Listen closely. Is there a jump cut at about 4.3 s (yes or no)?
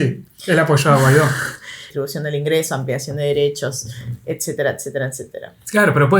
no